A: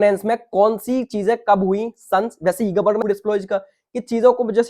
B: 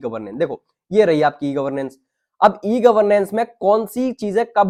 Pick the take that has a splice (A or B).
A